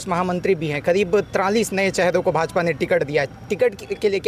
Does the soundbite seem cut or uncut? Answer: uncut